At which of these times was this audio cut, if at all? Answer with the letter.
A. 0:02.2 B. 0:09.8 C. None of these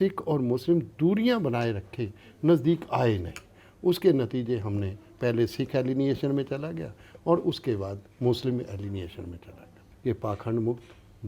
B